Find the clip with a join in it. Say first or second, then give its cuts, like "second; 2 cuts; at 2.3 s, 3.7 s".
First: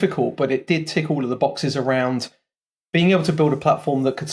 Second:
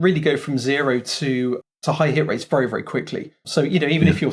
second; 2 cuts; at 1.6 s, 3.5 s